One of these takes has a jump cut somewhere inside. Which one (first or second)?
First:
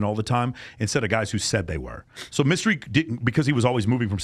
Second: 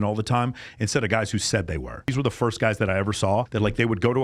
second